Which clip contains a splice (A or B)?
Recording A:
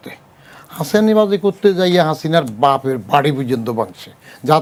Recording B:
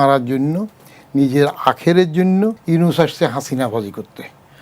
B